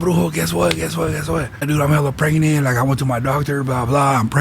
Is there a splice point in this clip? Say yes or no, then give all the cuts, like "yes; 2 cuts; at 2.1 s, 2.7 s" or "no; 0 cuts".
yes; 1 cut; at 1.7 s